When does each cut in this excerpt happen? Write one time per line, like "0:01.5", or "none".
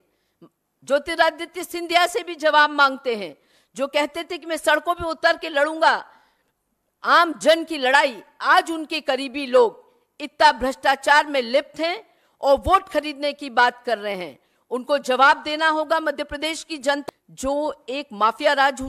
0:17.0